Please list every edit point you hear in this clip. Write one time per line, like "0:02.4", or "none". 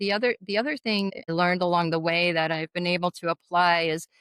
0:01.3